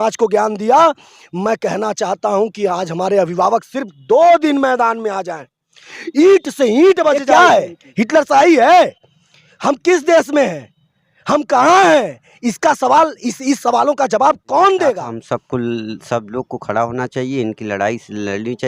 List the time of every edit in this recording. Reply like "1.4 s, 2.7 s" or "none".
7.2 s, 15.1 s